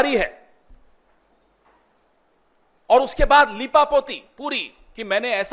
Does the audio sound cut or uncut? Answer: uncut